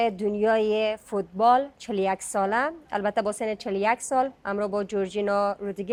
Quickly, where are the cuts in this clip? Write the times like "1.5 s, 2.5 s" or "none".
none